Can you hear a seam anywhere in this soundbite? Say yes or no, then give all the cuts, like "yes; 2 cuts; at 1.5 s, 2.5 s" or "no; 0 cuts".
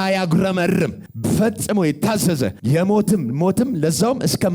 yes; 2 cuts; at 1.1 s, 2.6 s